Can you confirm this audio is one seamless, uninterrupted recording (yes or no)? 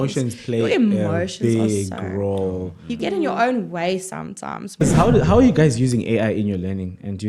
no